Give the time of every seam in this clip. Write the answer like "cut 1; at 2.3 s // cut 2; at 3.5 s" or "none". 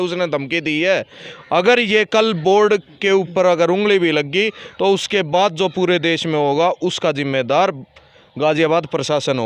none